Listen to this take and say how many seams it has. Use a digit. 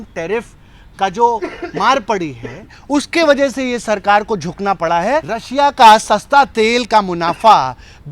1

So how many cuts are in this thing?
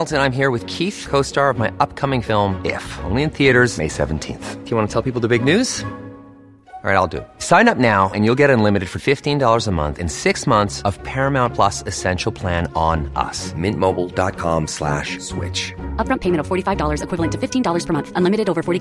0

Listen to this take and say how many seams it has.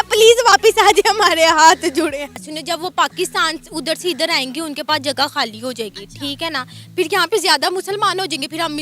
1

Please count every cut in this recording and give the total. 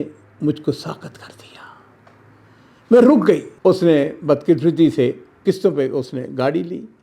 1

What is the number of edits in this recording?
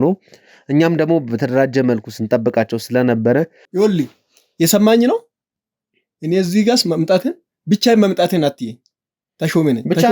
1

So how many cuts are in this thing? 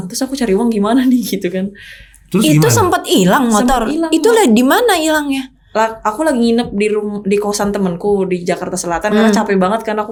0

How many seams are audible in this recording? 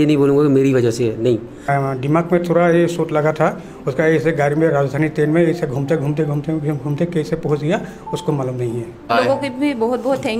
2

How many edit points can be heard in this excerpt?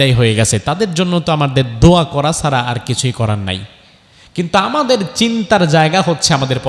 0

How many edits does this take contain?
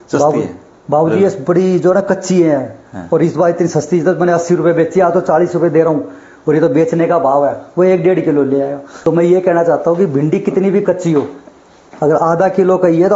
1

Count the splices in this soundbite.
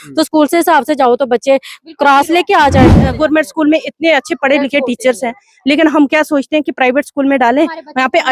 1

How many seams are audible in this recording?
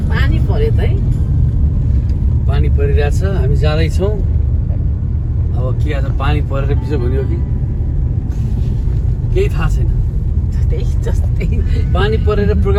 0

